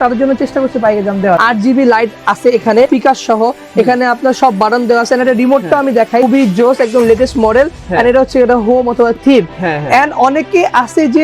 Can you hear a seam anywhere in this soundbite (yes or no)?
yes